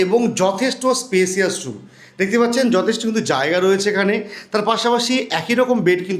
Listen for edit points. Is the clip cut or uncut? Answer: uncut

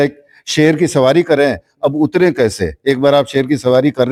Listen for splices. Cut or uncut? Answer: uncut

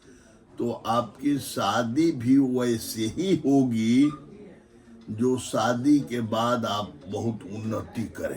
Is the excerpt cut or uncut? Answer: uncut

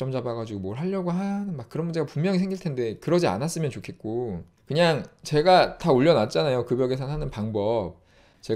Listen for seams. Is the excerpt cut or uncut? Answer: cut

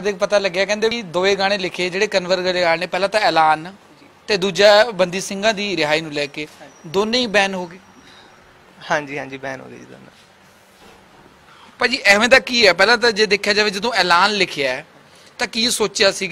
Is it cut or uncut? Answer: cut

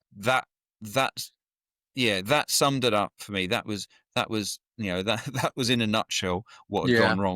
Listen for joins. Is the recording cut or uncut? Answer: uncut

